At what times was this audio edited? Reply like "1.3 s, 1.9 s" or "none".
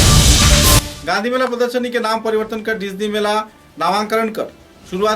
0.9 s